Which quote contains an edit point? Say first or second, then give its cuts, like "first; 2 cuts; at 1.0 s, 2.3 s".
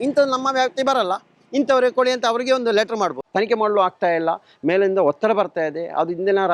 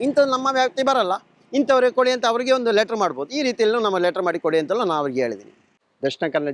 first; 1 cut; at 3.2 s